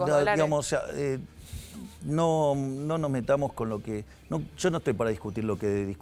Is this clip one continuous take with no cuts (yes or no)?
yes